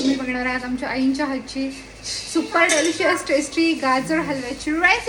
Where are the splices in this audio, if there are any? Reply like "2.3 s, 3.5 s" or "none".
none